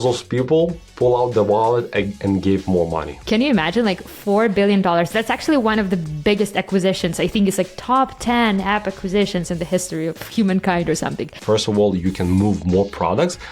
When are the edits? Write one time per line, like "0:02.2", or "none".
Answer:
0:03.2
0:11.3